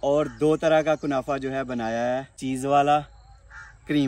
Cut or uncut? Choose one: cut